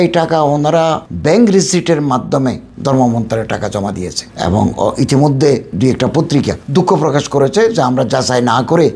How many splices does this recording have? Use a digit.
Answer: 1